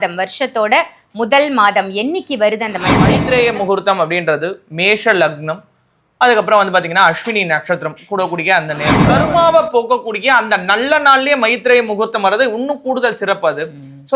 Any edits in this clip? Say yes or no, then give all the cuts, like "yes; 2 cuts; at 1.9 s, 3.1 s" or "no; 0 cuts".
yes; 2 cuts; at 3.1 s, 9.0 s